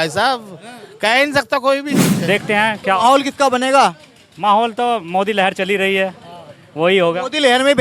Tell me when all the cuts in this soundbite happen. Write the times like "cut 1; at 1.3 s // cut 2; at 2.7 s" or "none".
cut 1; at 2.1 s

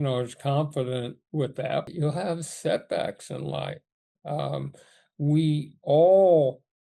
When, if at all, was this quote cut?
cut 1; at 1.9 s

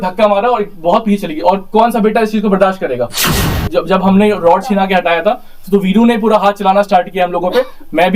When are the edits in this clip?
cut 1; at 3.5 s

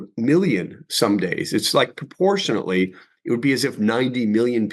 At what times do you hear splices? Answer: none

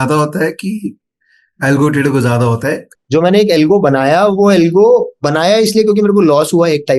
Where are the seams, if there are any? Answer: cut 1; at 2.9 s

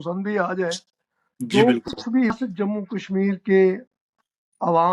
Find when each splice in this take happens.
cut 1; at 2.3 s

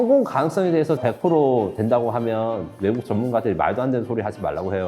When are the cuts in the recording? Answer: cut 1; at 1.0 s

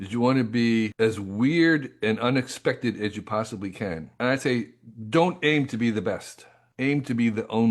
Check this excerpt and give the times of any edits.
cut 1; at 4.2 s

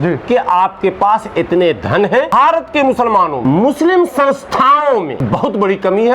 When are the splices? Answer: cut 1; at 2.3 s // cut 2; at 3.4 s // cut 3; at 5.2 s

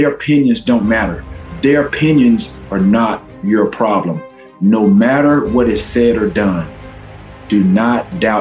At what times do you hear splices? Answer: cut 1; at 1.4 s

